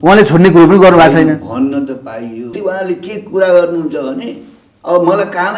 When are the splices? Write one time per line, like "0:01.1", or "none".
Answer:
0:02.5